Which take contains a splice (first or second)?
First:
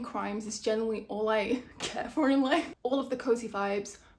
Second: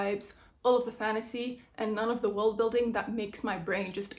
first